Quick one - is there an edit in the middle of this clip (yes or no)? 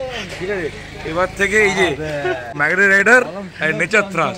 yes